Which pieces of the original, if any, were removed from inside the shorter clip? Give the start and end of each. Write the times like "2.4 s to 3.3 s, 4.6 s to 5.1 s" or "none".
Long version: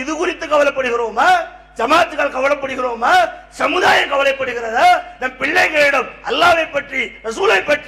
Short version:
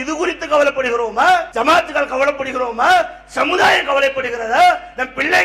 1.5 s to 1.7 s